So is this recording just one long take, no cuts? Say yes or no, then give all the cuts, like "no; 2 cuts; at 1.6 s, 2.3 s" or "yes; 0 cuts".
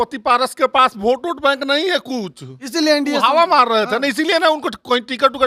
yes; 0 cuts